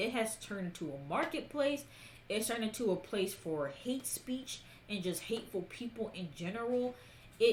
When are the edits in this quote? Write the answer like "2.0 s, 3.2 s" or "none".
none